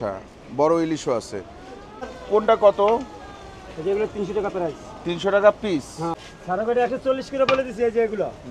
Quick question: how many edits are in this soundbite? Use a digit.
2